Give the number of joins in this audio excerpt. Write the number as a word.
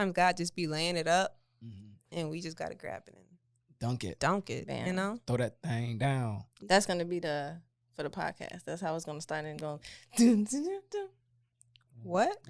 one